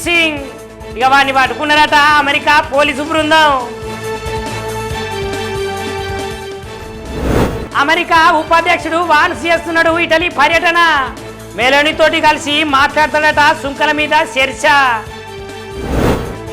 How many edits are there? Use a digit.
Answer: 0